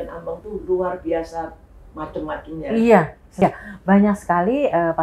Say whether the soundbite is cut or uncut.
cut